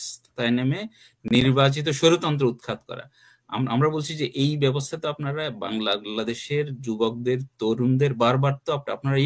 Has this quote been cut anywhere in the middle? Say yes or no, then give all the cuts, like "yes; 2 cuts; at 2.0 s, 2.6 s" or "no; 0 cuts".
no; 0 cuts